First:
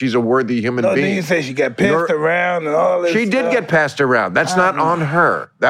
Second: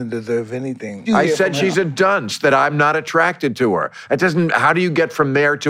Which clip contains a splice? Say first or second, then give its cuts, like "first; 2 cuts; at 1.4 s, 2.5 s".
second; 1 cut; at 1.0 s